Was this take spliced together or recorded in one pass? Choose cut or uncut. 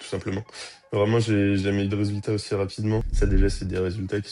cut